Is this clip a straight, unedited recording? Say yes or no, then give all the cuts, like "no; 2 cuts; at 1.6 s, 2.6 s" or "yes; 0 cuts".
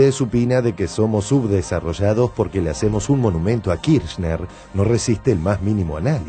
yes; 0 cuts